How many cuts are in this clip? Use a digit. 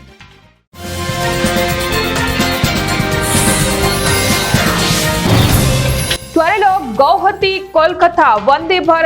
1